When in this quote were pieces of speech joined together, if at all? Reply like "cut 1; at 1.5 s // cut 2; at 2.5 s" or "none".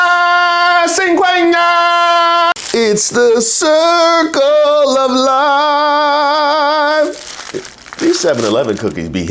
cut 1; at 2.6 s